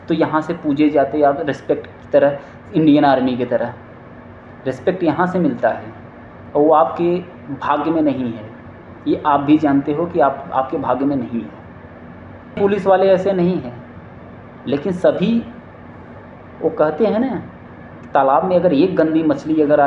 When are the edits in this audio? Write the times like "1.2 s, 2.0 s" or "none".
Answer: 12.6 s